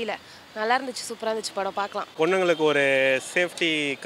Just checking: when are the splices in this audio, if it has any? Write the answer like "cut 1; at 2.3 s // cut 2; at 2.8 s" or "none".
cut 1; at 2.1 s

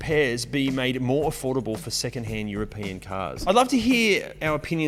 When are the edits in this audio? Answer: cut 1; at 3.4 s

